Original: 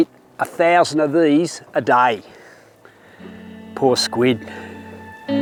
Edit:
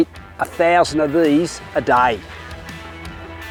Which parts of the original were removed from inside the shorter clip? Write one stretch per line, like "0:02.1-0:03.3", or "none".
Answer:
none